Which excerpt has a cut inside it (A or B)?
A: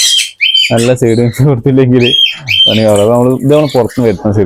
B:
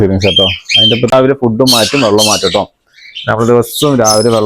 B